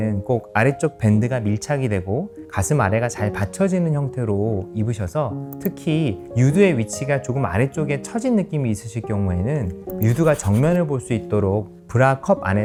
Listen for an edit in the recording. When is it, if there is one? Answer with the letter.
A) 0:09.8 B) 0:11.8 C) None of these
C